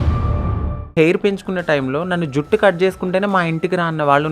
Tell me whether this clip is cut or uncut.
cut